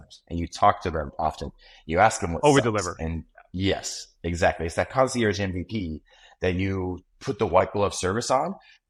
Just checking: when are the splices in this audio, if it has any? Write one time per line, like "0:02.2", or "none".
none